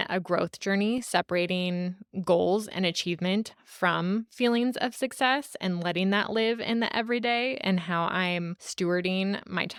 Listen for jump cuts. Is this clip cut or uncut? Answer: uncut